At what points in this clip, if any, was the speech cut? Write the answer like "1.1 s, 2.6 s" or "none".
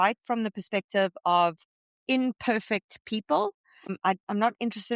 3.9 s